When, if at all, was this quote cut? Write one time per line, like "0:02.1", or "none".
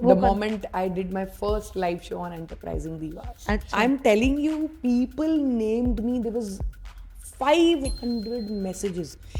0:03.7

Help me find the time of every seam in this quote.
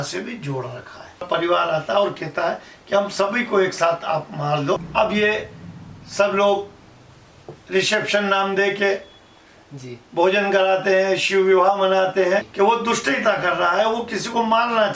0:01.2
0:04.9
0:12.5

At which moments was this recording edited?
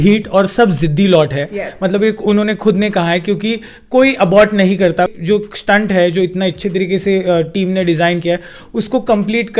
0:05.1

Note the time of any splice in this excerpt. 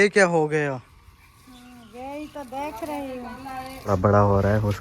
0:03.9

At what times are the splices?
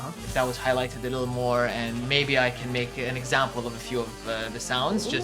none

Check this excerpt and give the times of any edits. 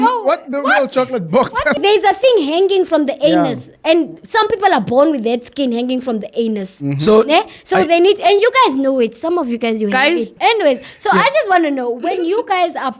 0:01.8
0:10.3

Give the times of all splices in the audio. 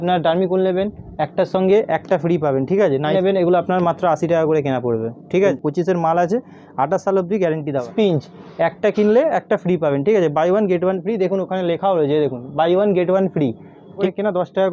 0:03.1
0:05.6
0:07.9
0:14.0

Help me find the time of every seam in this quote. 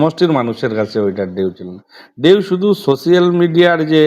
none

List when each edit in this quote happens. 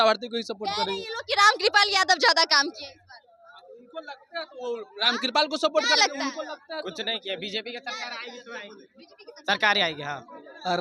none

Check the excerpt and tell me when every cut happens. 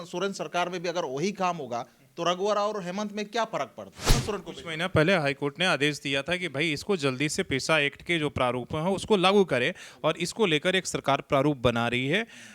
0:04.2

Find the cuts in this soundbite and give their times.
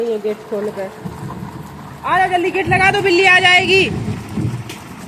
none

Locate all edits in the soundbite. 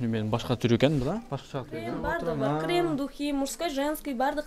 0:01.9

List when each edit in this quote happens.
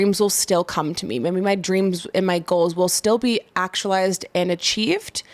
none

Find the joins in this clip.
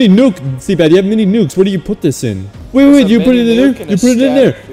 0:02.6

